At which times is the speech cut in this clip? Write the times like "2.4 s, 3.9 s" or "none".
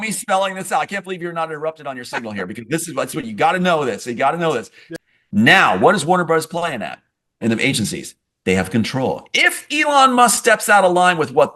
4.9 s

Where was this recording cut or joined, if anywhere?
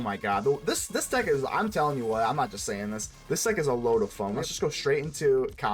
4.4 s

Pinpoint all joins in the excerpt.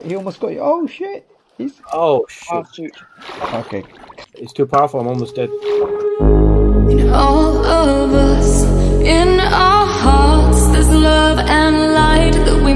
4.0 s, 5.6 s

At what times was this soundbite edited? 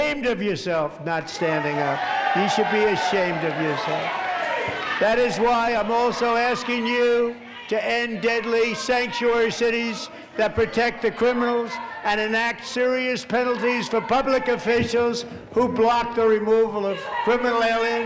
none

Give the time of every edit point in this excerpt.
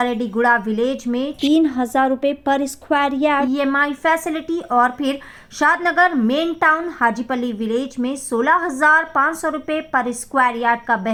none

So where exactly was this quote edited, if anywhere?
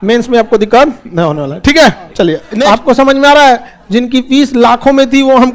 2.5 s

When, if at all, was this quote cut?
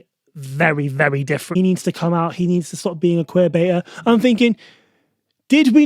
1.4 s

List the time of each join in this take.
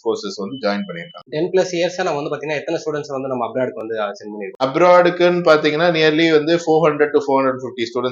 1.3 s, 4.6 s

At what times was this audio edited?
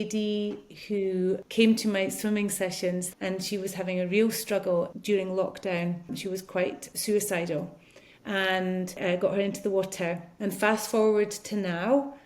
1.4 s, 3.1 s, 5.0 s, 6.6 s, 9.0 s, 10.3 s

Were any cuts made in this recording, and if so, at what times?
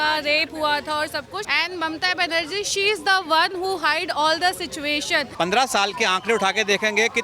1.5 s, 5.3 s

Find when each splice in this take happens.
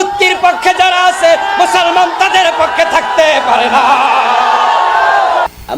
none

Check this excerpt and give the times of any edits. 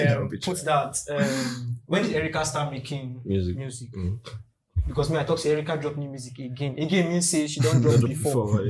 1.7 s

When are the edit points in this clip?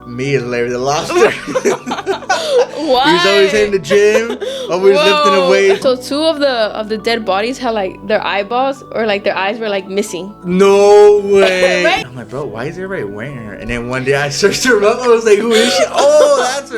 5.8 s, 12.0 s

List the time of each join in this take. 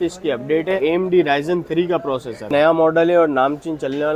0.8 s, 2.5 s

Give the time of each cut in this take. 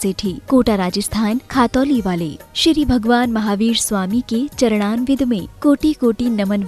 none

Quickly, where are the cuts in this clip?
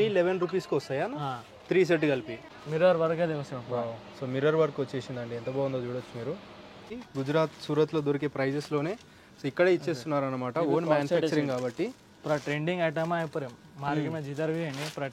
2.4 s, 6.8 s

